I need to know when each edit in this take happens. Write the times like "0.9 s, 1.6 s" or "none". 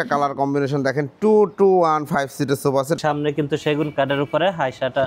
3.0 s